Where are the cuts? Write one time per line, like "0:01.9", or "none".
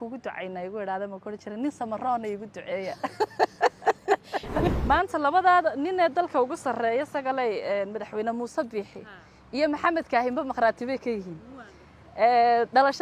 0:04.7